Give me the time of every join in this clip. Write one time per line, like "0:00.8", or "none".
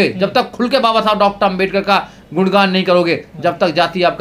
none